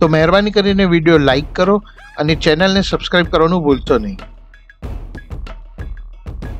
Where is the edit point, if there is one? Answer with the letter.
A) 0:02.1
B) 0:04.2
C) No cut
B